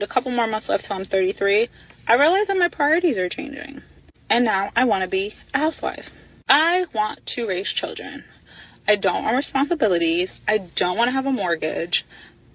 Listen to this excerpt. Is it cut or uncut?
uncut